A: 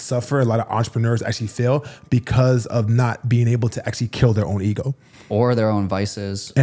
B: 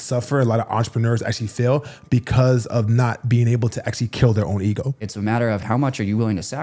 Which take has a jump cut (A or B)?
B